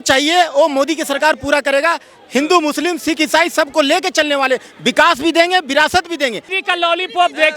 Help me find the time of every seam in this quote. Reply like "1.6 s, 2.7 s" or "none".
6.5 s